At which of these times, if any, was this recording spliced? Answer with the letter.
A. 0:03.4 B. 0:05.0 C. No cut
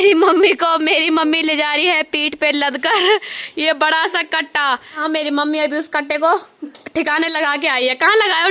B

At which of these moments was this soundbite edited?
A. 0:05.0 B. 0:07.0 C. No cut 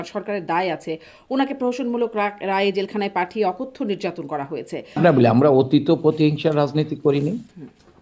A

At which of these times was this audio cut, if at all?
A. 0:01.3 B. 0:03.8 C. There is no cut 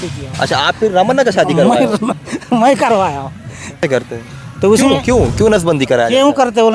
B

